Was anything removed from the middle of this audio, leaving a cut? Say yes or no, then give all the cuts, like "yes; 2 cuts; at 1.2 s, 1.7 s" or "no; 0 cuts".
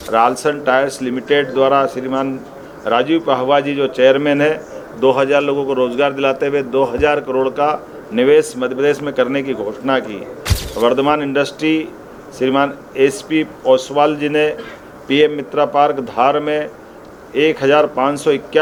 no; 0 cuts